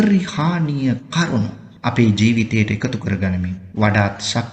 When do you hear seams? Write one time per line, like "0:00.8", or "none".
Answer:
0:01.6
0:03.6